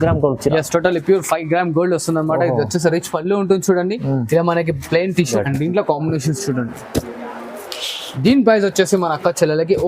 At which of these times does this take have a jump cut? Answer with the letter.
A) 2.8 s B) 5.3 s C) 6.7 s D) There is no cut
B